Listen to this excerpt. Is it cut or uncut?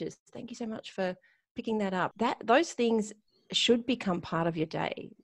cut